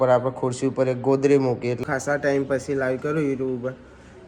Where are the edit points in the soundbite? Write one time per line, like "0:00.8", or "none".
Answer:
0:01.9